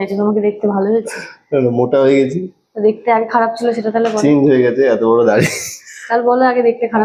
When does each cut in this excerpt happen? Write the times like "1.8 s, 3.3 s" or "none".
none